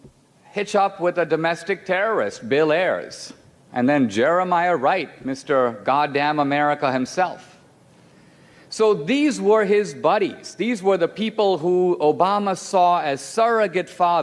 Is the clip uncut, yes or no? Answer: no